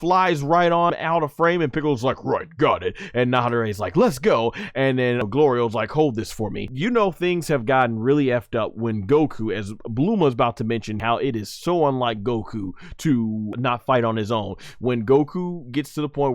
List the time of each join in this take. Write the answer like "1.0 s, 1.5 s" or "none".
0.9 s, 5.2 s, 6.7 s, 11.0 s, 13.5 s